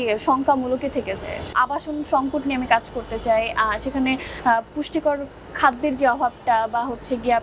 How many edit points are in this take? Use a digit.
1